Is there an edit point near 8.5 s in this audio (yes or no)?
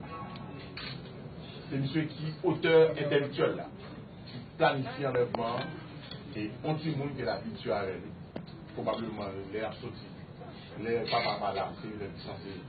yes